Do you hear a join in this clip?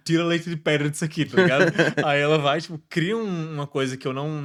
no; 0 cuts

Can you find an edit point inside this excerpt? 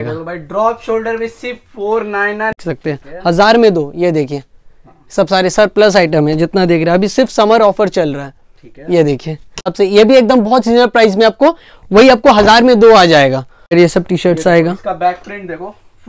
yes; 3 cuts; at 2.5 s, 9.7 s, 13.7 s

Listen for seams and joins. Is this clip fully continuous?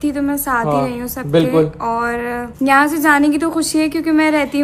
no; 1 cut; at 2.4 s

